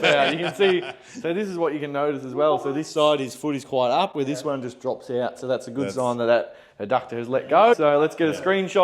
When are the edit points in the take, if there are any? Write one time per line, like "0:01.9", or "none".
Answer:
0:07.7